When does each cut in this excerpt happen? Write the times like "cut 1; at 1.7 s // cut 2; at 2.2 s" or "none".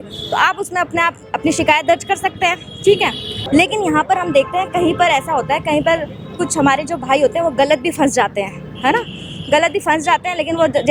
cut 1; at 3.3 s